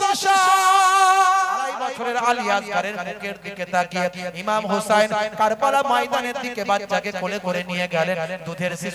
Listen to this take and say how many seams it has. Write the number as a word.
one